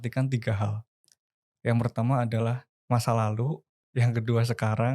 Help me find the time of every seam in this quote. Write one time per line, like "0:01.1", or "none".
0:02.7